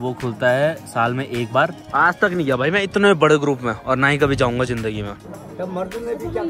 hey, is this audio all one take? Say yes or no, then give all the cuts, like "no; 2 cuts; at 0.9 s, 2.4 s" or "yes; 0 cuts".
no; 2 cuts; at 1.8 s, 5.2 s